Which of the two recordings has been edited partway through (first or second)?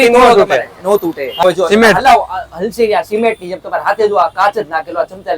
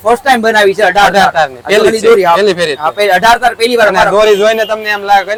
first